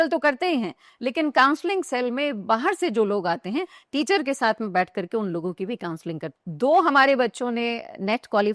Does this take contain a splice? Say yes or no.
yes